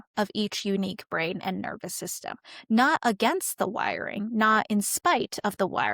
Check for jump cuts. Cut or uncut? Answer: uncut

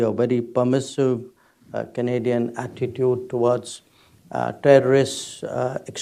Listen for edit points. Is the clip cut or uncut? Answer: uncut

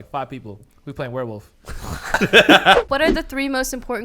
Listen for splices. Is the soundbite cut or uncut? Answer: cut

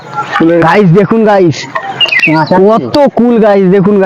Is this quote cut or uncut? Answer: uncut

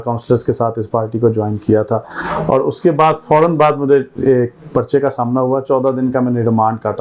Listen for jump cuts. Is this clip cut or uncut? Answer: uncut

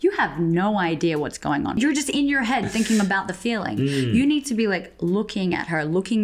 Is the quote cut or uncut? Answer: cut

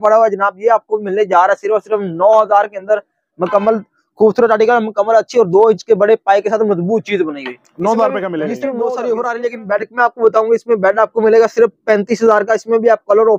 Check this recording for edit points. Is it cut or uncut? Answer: cut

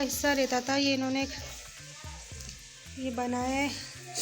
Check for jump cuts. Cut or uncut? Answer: uncut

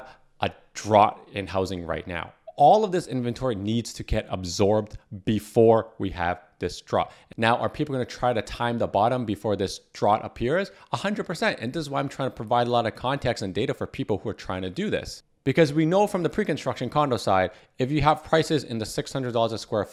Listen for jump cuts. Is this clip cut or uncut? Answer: uncut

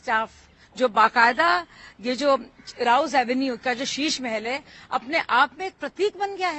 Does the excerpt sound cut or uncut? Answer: uncut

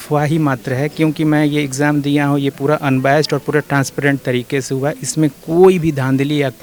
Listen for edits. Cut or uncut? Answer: uncut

